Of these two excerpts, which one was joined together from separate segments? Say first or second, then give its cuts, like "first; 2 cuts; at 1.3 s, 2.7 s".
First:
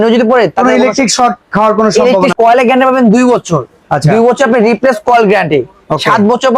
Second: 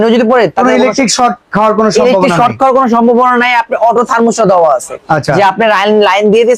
first; 1 cut; at 2.3 s